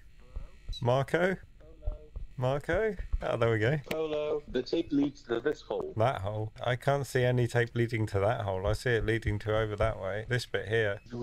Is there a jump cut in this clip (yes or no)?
no